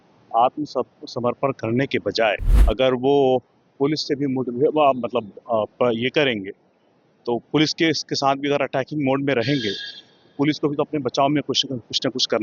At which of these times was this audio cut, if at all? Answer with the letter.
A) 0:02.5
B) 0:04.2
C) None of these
A